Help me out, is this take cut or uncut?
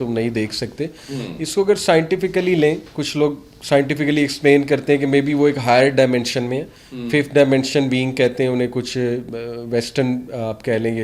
uncut